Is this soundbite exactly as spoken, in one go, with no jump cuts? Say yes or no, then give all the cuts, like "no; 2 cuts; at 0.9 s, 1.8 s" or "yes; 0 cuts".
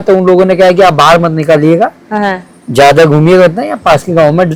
yes; 0 cuts